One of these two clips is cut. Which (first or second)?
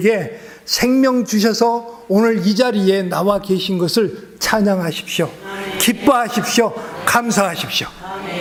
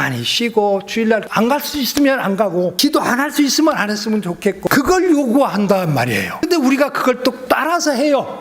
second